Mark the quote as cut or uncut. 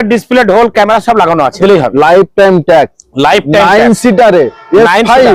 cut